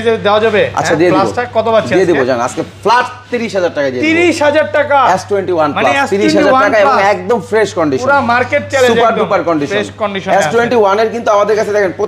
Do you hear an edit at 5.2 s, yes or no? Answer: no